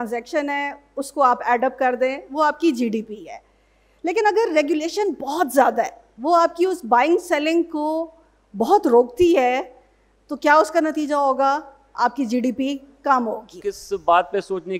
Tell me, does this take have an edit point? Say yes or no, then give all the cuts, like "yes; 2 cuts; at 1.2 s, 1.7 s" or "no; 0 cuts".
yes; 1 cut; at 13.6 s